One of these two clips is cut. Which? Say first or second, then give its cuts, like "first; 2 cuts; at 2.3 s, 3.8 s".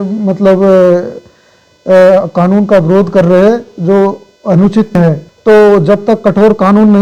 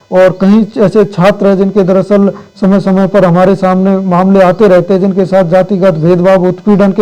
first; 1 cut; at 4.9 s